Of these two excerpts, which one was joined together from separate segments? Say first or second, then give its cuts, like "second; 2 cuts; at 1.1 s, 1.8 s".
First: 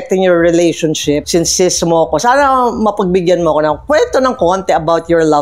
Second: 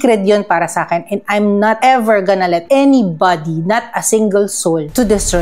first; 1 cut; at 1.2 s